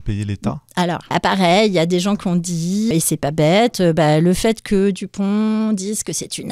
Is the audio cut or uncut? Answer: cut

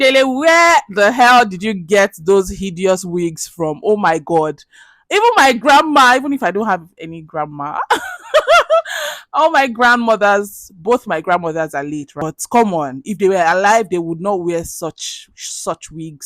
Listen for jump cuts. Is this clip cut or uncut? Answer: cut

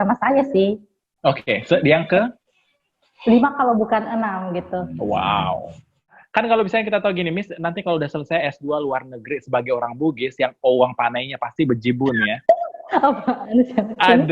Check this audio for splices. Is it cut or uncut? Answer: cut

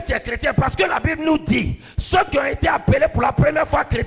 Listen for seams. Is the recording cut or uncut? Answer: uncut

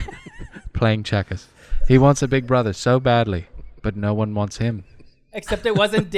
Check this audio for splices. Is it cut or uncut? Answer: uncut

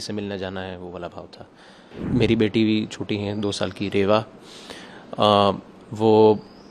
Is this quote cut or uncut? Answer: cut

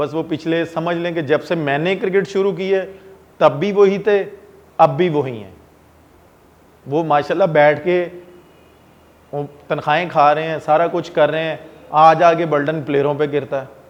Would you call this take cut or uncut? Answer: uncut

